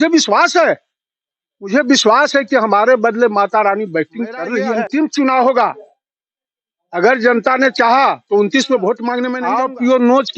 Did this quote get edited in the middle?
yes; 2 cuts; at 4.7 s, 9.4 s

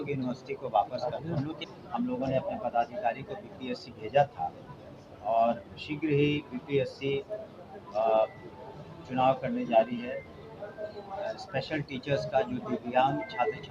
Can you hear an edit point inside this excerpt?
yes; 1 cut; at 1.6 s

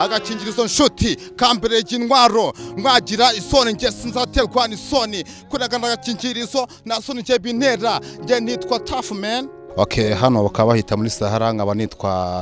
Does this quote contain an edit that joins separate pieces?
yes; 1 cut; at 9.6 s

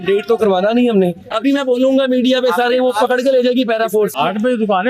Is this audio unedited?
no; 2 cuts; at 1.3 s, 4.1 s

